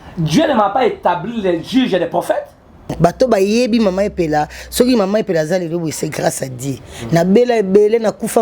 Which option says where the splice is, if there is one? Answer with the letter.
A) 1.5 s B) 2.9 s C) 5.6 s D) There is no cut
B